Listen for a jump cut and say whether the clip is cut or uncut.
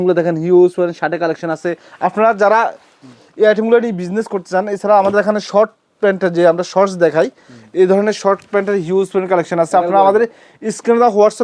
uncut